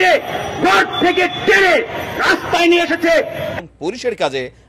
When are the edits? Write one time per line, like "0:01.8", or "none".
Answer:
0:03.6